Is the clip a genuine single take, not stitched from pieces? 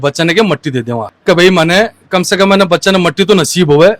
yes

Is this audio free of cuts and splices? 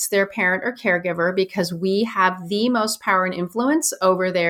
yes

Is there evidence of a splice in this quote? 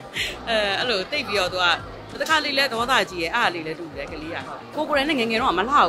yes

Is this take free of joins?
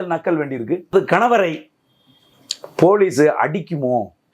no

